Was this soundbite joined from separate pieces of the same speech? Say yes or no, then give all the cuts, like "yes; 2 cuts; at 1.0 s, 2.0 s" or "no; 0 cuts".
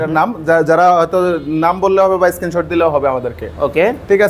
no; 0 cuts